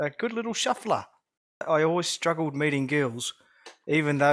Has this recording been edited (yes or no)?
yes